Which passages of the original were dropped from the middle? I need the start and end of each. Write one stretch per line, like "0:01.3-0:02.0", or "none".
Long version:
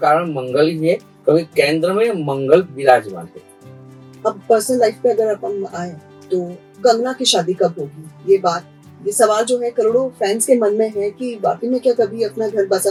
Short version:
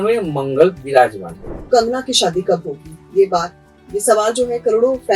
0:03.4-0:06.6